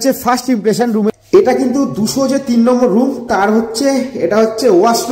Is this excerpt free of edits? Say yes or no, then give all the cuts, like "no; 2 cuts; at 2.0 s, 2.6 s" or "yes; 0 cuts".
no; 1 cut; at 1.1 s